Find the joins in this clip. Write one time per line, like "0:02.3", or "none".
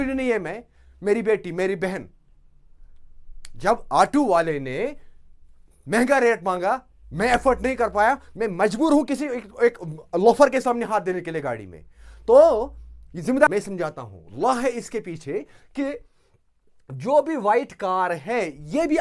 0:13.5